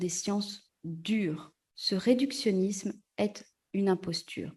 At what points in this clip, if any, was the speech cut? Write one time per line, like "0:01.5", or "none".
none